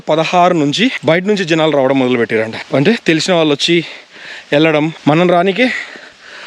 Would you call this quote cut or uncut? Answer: cut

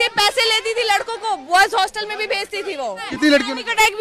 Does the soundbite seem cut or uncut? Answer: cut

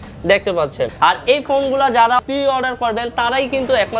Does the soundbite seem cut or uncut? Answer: cut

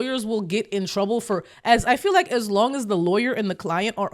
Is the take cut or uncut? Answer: uncut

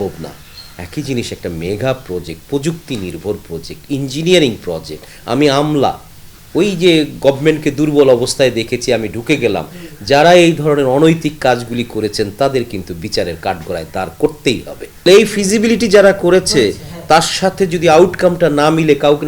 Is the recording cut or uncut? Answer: cut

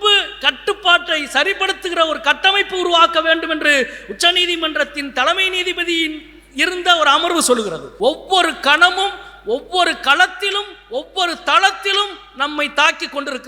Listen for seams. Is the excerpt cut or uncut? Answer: cut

